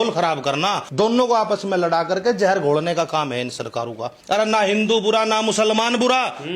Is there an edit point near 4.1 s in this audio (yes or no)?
yes